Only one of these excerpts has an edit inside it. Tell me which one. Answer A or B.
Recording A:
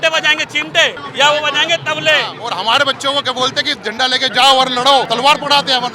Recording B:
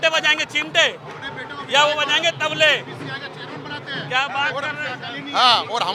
A